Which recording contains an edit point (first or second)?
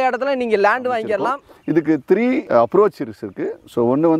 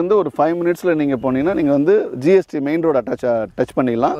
first